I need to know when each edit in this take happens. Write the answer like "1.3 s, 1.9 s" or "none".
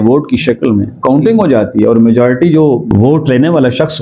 2.9 s

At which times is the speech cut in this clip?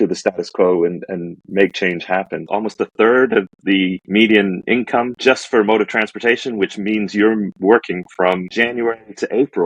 2.4 s, 4.0 s, 5.1 s, 8.5 s

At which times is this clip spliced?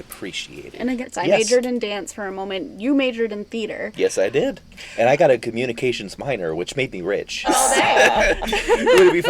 1.0 s, 4.7 s, 7.5 s

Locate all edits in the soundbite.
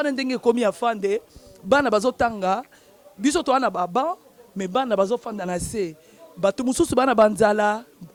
none

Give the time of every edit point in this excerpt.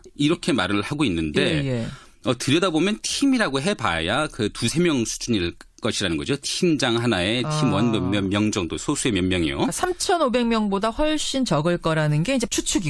2.1 s

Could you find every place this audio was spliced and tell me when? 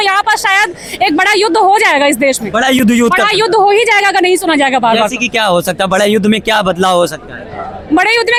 none

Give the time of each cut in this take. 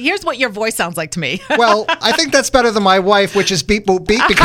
none

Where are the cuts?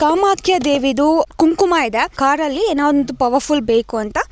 1.3 s, 2.1 s

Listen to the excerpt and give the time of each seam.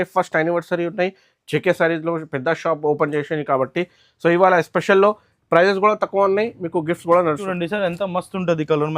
7.4 s

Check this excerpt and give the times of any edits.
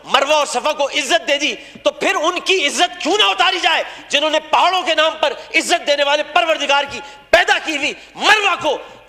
none

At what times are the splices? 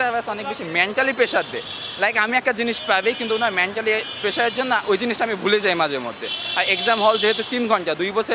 none

